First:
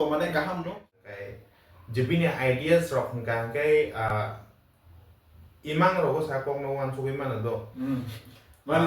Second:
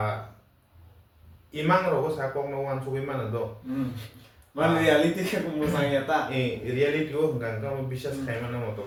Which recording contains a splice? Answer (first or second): first